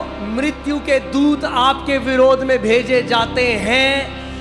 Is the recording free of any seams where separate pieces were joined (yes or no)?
yes